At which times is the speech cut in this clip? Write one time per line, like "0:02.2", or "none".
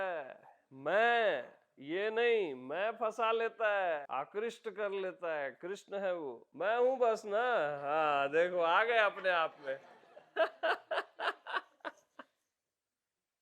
0:04.1
0:06.4